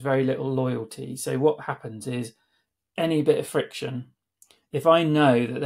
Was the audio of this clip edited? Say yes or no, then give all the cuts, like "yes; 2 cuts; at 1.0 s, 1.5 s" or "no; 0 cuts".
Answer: no; 0 cuts